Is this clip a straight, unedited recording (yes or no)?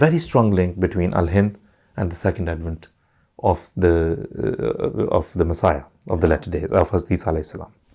yes